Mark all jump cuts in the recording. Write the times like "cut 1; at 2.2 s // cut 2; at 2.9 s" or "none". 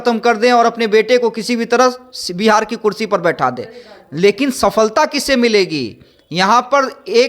none